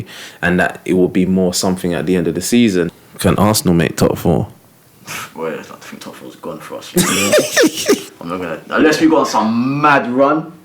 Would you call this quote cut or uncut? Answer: cut